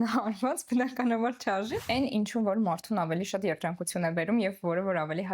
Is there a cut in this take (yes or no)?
yes